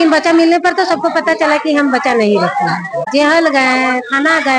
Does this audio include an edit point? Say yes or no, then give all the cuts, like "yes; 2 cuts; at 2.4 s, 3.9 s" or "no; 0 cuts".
yes; 1 cut; at 3.1 s